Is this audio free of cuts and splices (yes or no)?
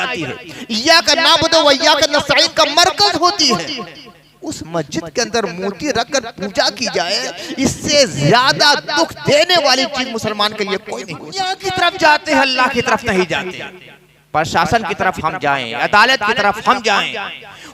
no